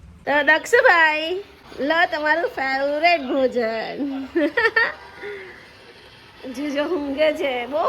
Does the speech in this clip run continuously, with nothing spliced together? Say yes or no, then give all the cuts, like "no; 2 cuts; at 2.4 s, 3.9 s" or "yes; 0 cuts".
no; 1 cut; at 1.6 s